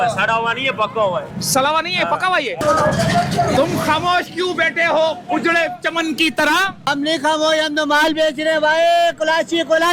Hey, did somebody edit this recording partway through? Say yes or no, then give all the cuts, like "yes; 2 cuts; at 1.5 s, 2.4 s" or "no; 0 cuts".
yes; 2 cuts; at 2.6 s, 6.9 s